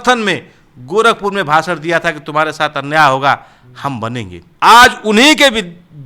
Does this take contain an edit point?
yes; 1 cut; at 4.4 s

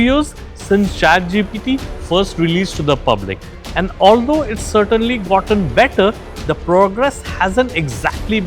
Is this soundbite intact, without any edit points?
yes; 0 cuts

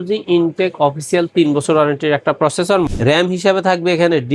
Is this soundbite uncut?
no; 1 cut; at 2.9 s

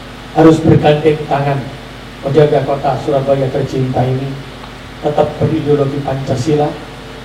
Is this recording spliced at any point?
no; 0 cuts

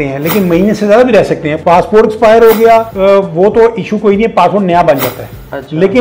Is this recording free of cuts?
no; 2 cuts; at 1.5 s, 2.9 s

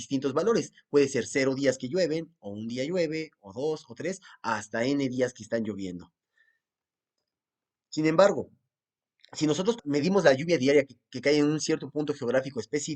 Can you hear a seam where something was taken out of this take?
yes; 1 cut; at 9.8 s

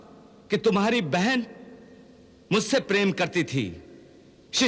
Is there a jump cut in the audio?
no; 0 cuts

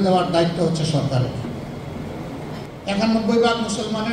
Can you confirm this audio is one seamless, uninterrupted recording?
no; 1 cut; at 2.7 s

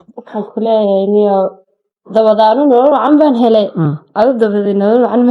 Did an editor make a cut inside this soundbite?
no; 0 cuts

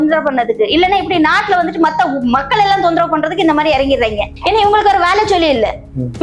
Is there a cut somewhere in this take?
yes; 1 cut; at 4.3 s

